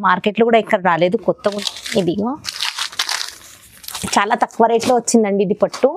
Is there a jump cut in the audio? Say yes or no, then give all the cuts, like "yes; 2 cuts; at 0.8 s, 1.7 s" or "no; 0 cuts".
yes; 1 cut; at 1.6 s